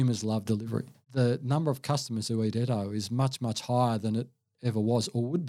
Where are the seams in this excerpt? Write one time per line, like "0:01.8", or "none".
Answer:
0:01.0